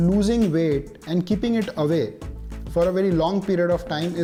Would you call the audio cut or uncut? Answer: uncut